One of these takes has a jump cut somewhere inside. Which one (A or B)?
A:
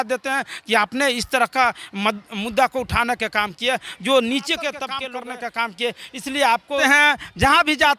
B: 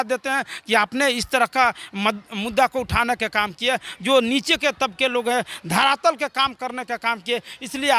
A